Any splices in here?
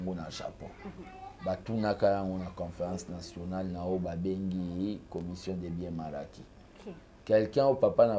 no; 0 cuts

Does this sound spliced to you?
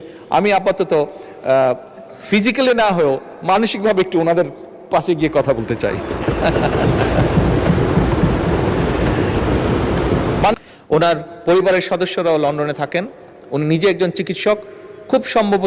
yes; 1 cut; at 10.5 s

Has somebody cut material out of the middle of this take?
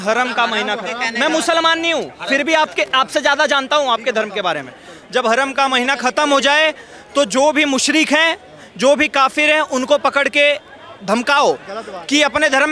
no; 0 cuts

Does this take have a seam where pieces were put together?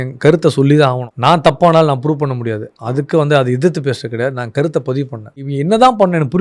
yes; 2 cuts; at 1.1 s, 5.4 s

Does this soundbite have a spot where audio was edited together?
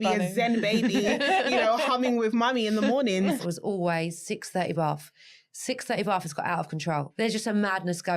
yes; 2 cuts; at 3.4 s, 7.1 s

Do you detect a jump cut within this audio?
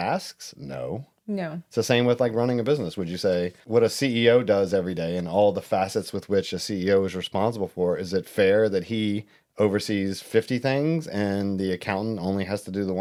no; 0 cuts

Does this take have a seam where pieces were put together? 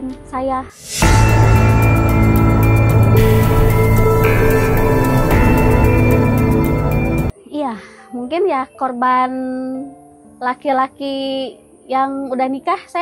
yes; 1 cut; at 7.3 s

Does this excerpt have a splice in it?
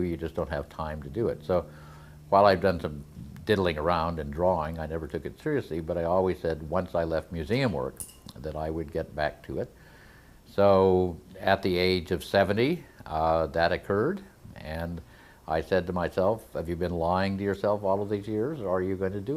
yes; 1 cut; at 17.7 s

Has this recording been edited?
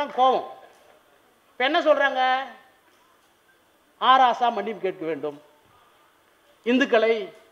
no; 0 cuts

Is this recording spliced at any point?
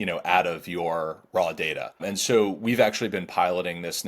yes; 1 cut; at 2.0 s

